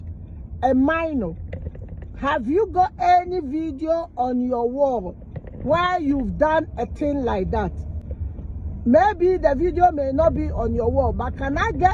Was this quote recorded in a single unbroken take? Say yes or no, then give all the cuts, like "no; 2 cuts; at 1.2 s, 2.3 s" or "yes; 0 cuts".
yes; 0 cuts